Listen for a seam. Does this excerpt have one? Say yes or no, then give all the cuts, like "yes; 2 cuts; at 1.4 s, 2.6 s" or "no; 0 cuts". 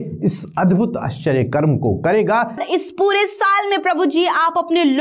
yes; 1 cut; at 2.6 s